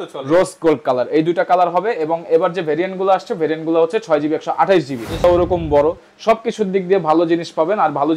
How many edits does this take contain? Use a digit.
1